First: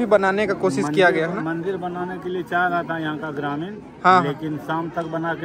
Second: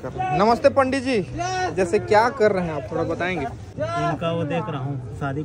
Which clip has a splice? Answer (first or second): second